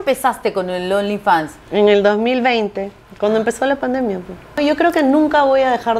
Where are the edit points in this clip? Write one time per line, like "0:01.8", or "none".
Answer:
0:04.6